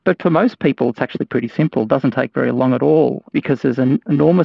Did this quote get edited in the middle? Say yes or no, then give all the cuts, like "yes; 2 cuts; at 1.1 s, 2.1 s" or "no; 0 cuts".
yes; 1 cut; at 3.3 s